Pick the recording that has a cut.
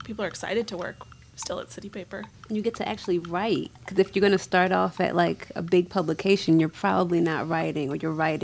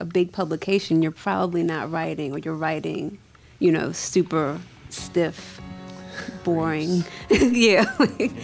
first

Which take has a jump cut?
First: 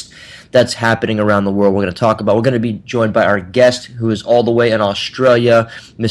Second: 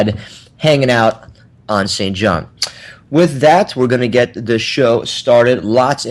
first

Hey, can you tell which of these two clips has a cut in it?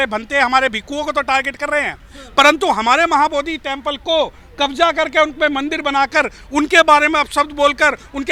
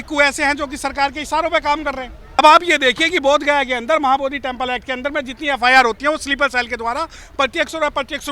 second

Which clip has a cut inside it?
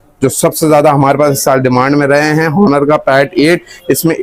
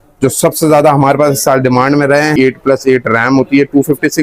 second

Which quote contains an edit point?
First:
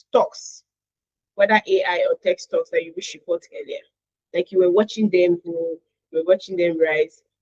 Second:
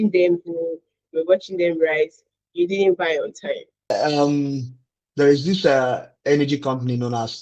second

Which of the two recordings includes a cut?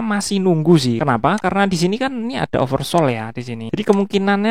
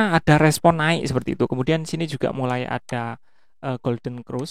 first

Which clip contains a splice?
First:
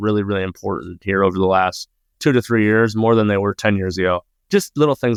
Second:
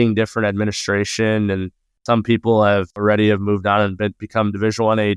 second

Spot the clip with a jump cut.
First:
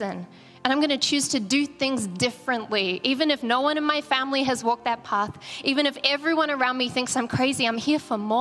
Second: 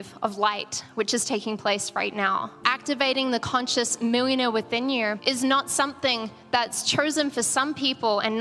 second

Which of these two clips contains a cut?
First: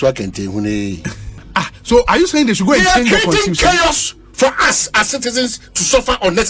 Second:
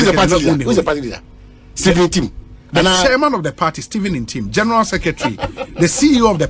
first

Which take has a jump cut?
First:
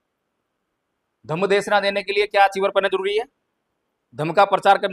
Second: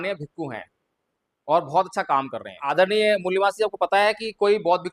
second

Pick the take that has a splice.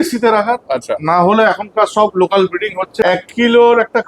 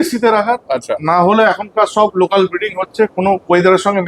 first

